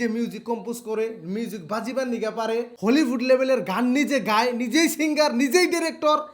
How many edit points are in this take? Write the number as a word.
one